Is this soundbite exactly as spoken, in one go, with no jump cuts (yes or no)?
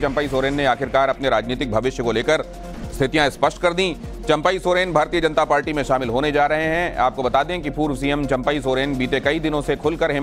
no